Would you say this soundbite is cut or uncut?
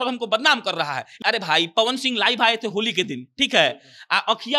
cut